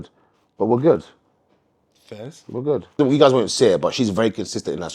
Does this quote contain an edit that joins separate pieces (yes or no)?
yes